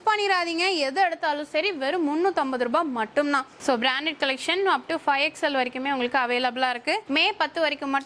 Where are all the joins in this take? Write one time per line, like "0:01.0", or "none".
0:03.5
0:07.0